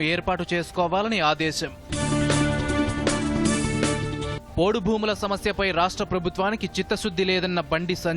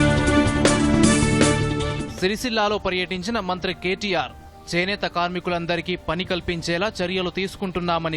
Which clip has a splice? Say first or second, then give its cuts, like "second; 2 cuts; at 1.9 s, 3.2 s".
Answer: second; 1 cut; at 1.7 s